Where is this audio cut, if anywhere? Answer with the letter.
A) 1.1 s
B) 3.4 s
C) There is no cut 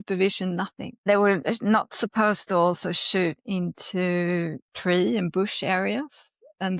A